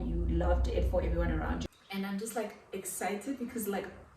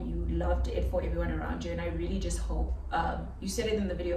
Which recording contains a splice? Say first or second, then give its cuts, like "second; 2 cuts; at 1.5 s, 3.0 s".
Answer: first; 1 cut; at 1.6 s